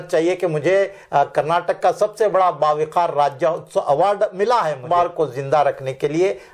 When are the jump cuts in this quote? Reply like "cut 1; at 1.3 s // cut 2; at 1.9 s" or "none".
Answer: cut 1; at 4.8 s